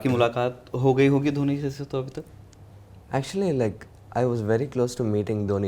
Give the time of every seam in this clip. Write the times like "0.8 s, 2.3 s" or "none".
none